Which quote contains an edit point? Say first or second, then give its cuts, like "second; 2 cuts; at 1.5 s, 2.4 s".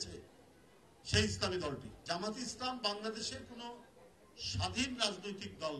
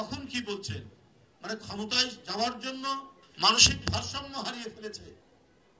first; 1 cut; at 1.9 s